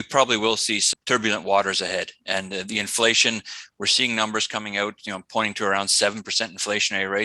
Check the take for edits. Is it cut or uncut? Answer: cut